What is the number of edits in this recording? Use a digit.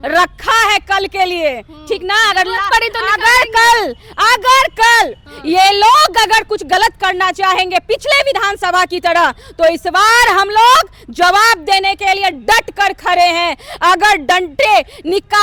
0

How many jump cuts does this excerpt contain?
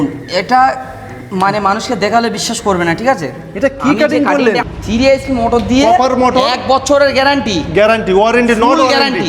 1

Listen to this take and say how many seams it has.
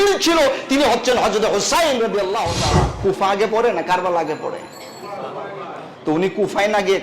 1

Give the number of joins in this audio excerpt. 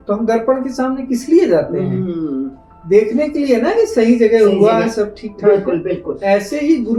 0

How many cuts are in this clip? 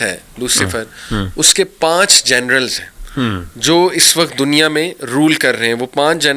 0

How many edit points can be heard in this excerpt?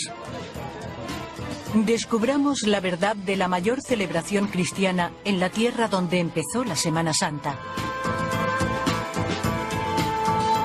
0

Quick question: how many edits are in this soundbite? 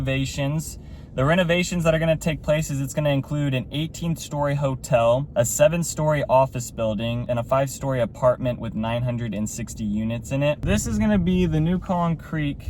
3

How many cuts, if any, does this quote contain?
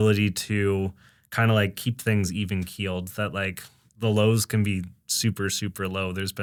0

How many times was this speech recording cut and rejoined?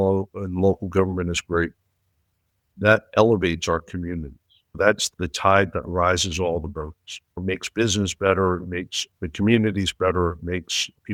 0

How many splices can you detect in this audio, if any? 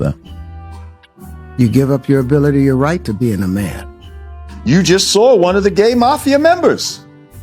1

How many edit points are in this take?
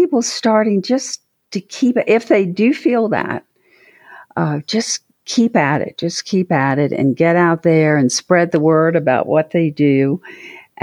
0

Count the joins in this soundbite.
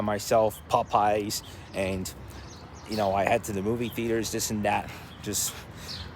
0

